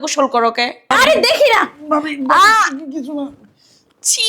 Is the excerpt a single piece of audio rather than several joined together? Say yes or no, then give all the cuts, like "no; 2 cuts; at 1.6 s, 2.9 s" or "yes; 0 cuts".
no; 1 cut; at 0.9 s